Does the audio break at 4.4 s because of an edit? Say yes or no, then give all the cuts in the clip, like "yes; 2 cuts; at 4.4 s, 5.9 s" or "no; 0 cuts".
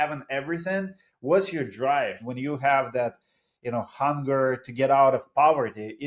no; 1 cut; at 2.2 s